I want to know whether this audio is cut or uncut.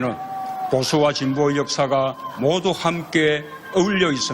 uncut